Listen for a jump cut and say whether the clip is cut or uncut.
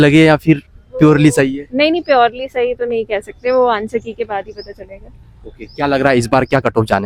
uncut